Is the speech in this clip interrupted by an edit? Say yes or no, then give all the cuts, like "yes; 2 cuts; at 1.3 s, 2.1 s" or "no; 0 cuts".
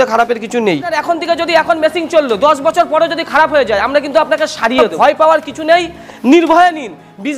yes; 2 cuts; at 1.0 s, 4.9 s